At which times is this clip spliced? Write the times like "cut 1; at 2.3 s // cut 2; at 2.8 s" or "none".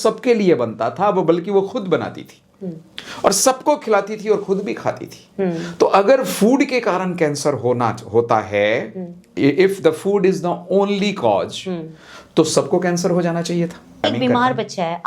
cut 1; at 14.0 s